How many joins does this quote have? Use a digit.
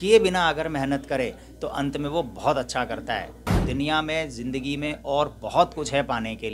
1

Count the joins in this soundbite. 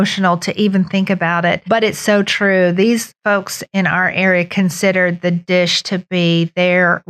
2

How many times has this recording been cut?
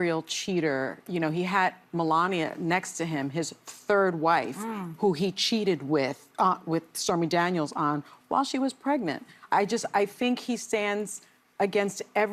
0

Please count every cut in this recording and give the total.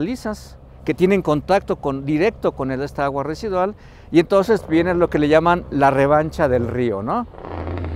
0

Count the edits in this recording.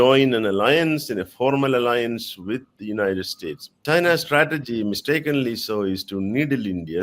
1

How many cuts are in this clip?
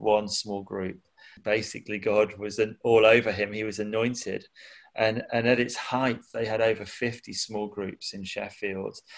1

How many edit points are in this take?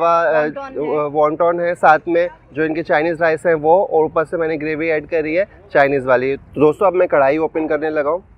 1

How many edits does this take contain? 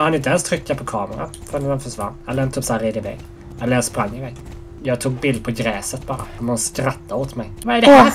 1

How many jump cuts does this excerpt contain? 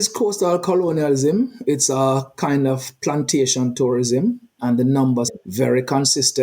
2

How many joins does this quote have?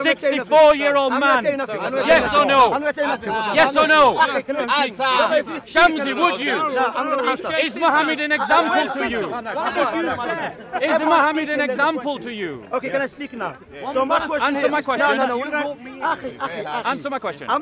0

